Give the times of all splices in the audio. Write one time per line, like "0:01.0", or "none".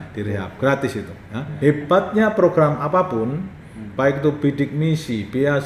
0:01.4